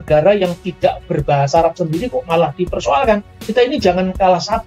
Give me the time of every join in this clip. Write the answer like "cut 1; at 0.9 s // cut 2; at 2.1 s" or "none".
cut 1; at 3.4 s